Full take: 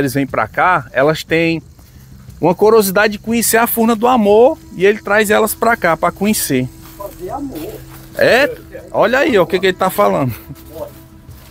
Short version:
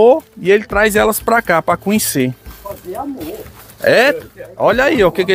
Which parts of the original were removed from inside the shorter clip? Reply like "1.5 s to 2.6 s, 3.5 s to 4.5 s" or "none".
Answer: none